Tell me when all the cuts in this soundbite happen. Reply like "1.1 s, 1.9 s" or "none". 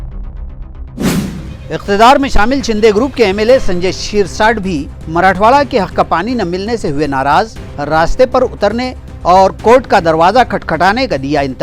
1.4 s